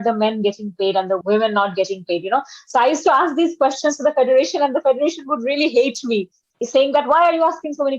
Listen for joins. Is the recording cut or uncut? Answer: cut